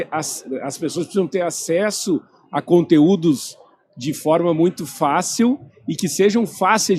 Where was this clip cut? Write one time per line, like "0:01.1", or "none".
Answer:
none